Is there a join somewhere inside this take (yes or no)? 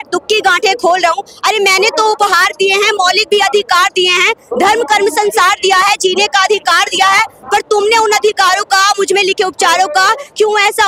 no